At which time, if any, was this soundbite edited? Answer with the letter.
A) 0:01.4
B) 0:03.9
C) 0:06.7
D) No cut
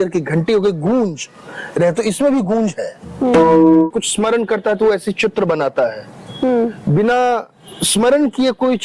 B